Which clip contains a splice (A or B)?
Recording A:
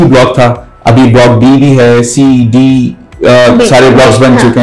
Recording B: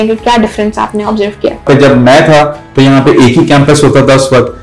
B